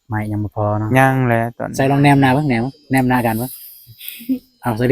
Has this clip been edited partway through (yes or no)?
yes